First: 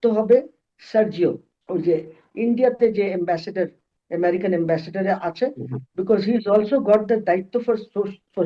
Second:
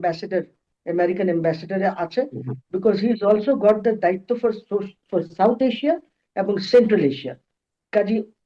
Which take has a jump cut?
first; 1 cut; at 1.5 s

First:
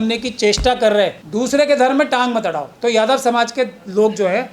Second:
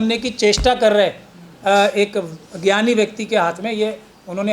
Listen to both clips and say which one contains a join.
first; 1 cut; at 1.2 s

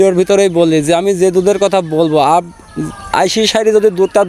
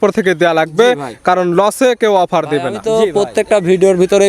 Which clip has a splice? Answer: second; 1 cut; at 2.8 s

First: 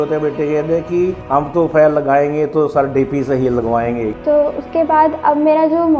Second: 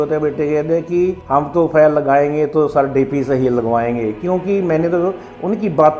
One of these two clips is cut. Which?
first; 1 cut; at 4.1 s

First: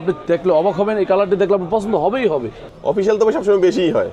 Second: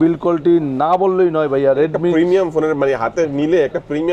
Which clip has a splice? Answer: first; 1 cut; at 2.7 s

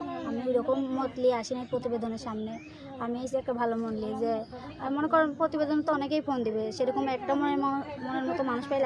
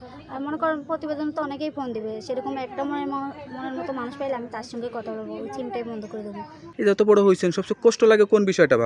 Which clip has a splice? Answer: second; 1 cut; at 6.6 s

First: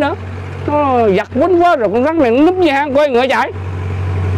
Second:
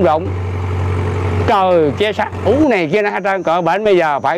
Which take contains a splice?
second; 1 cut; at 2.4 s

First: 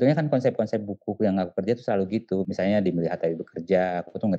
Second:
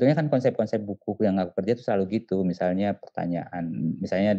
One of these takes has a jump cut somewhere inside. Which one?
first; 1 cut; at 2.4 s

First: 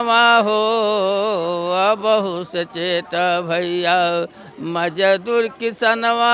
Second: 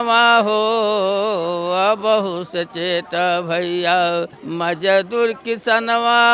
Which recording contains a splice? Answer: second; 1 cut; at 4.4 s

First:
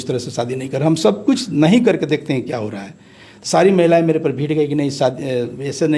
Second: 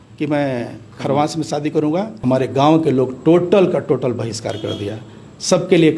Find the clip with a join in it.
second; 1 cut; at 2.1 s

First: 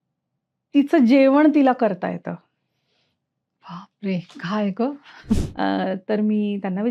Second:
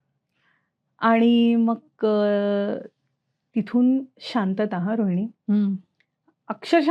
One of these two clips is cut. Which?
first; 1 cut; at 5.4 s

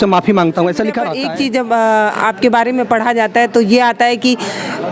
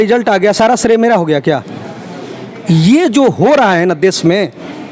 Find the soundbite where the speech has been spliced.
first; 1 cut; at 1.1 s

